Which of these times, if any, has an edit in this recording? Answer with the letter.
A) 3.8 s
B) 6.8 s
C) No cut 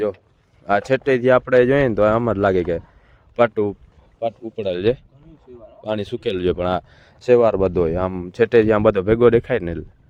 C